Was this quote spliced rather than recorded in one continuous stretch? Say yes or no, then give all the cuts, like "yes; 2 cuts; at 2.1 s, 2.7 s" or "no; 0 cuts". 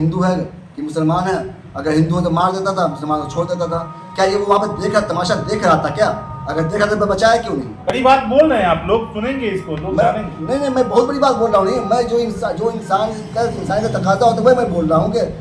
no; 0 cuts